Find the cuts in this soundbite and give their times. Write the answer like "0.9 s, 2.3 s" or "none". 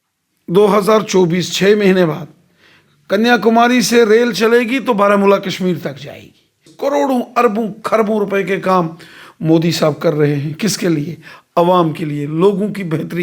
6.7 s